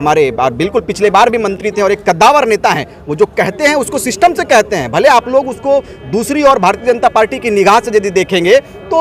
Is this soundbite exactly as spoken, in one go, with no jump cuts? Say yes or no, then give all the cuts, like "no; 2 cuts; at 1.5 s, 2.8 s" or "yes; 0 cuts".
yes; 0 cuts